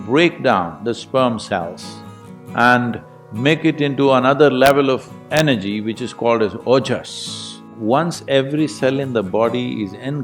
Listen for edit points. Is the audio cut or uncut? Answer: cut